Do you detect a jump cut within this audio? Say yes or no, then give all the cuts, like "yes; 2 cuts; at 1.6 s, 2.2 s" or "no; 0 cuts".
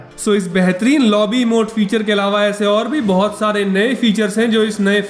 no; 0 cuts